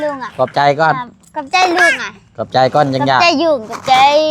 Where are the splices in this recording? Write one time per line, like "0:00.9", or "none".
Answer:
none

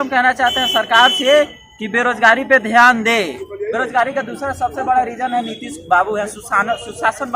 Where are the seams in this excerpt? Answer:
0:03.5

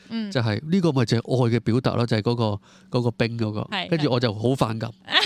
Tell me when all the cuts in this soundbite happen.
none

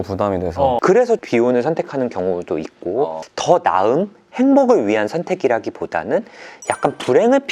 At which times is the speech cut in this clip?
0:03.3

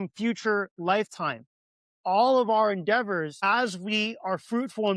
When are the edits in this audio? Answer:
0:03.4

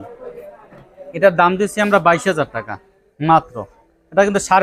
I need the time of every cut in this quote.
none

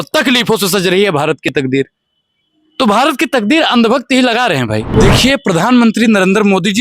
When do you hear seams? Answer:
0:04.9

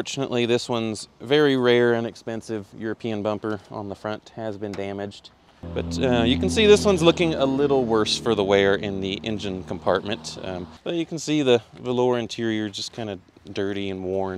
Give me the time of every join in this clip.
0:05.6
0:10.7

